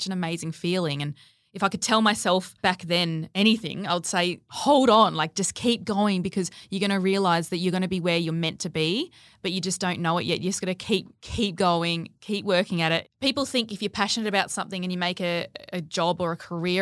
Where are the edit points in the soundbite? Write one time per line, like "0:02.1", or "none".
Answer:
0:02.7
0:04.5
0:13.1